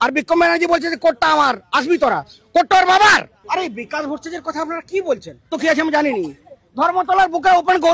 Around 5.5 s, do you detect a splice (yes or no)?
yes